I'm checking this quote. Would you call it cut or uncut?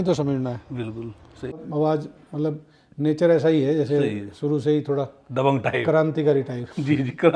cut